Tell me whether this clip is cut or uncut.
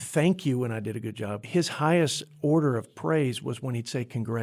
cut